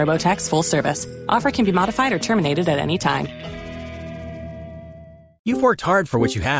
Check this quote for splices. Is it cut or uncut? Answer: cut